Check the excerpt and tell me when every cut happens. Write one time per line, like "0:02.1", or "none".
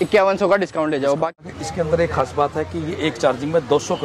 0:01.4